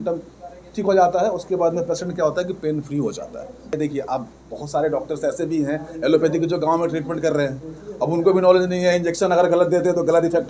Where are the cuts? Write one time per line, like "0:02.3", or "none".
0:03.7